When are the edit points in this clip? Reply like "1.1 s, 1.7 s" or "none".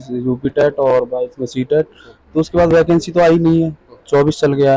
none

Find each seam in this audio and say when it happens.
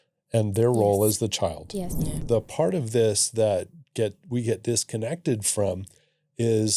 2.2 s

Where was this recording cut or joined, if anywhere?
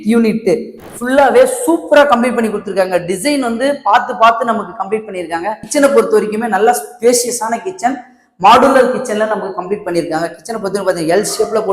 5.6 s

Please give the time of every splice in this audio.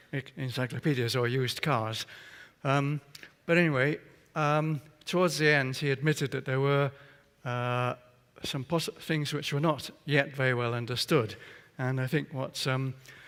none

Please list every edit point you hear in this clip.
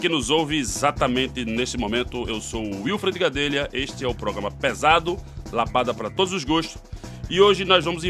none

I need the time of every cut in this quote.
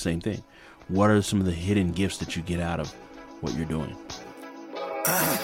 4.0 s

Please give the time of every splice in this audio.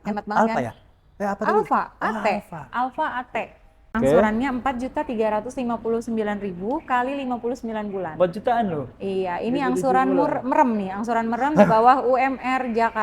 3.9 s

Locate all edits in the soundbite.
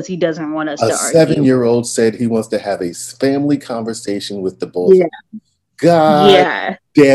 none

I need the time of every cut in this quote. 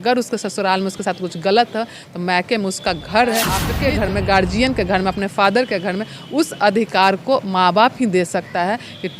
3.7 s

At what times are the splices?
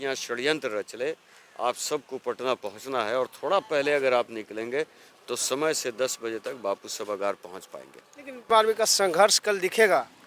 8.5 s

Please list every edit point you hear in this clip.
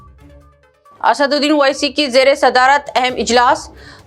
0.9 s

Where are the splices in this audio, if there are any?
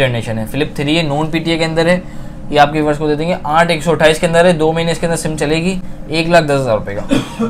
none

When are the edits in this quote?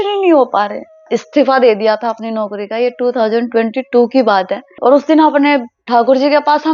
1.0 s, 4.7 s

